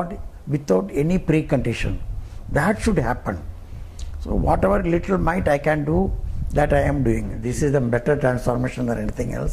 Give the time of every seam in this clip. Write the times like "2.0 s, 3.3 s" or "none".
7.4 s